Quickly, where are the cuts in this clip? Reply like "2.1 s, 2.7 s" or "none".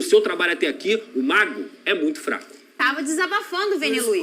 2.8 s

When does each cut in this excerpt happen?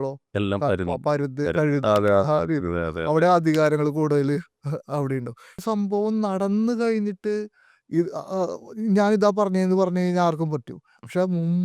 5.6 s

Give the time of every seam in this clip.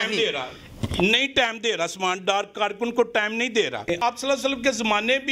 4.0 s

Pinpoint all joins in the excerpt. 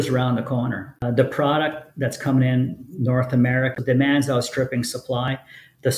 0.9 s, 3.7 s

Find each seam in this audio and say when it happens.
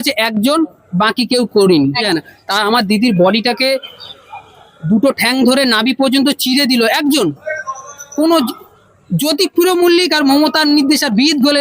2.1 s

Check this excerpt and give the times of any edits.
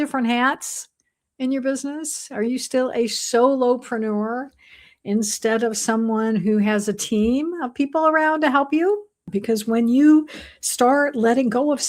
9.3 s

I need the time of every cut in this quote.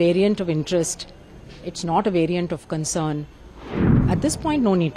3.8 s

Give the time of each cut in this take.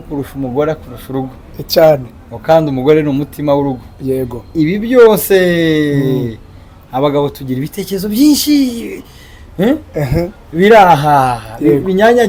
none

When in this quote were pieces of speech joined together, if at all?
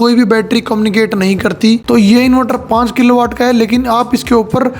1.8 s

